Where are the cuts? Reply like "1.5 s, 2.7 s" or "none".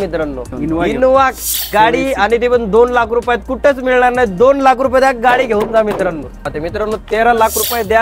0.9 s, 6.5 s